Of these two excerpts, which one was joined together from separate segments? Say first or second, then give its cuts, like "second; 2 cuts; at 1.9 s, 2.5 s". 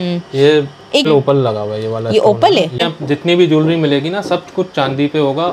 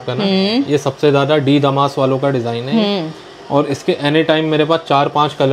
first; 2 cuts; at 1.1 s, 2.9 s